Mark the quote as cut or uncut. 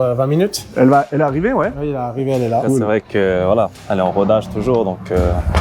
cut